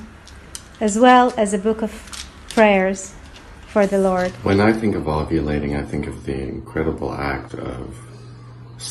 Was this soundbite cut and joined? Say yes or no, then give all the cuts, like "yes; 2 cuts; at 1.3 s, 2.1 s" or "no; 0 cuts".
yes; 1 cut; at 4.7 s